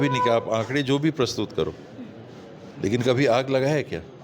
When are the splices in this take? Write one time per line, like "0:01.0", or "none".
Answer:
none